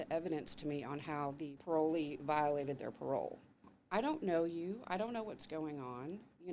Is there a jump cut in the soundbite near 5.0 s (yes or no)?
no